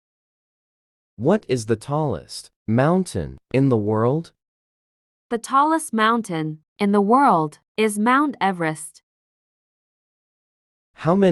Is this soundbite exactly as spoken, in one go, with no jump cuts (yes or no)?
yes